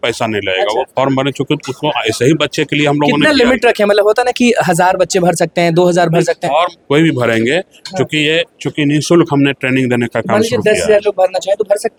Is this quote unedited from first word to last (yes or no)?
yes